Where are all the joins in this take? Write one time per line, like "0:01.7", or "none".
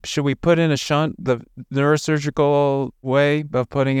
none